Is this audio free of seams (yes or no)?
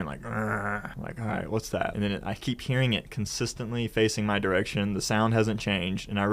no